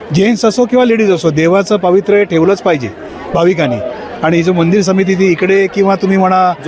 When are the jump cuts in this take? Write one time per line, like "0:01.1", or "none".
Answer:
none